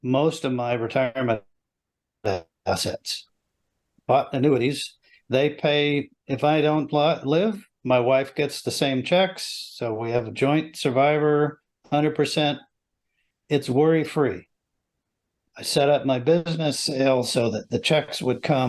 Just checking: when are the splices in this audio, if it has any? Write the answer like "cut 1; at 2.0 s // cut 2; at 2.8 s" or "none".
none